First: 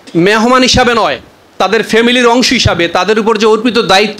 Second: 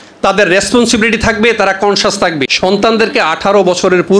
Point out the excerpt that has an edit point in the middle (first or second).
second